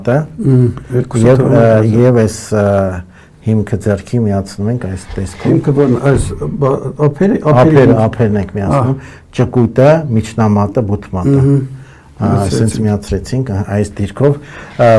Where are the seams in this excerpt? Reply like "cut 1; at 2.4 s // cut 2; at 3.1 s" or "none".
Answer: none